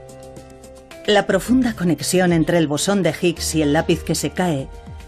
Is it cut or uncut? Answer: cut